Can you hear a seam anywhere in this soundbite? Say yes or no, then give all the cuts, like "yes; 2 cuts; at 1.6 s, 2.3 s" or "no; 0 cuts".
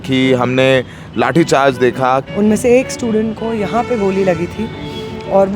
yes; 1 cut; at 2.3 s